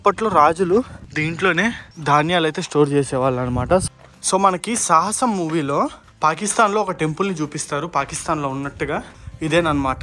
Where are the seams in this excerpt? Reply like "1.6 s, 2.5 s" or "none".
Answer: 3.8 s, 9.1 s